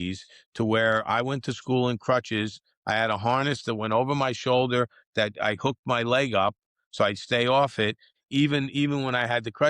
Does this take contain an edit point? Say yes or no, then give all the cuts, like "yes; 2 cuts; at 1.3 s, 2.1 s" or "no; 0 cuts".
yes; 1 cut; at 8.1 s